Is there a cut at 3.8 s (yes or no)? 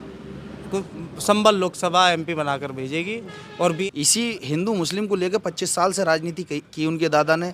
yes